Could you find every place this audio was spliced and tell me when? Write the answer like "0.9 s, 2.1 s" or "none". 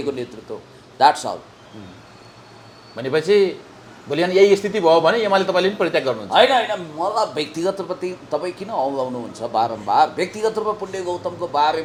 none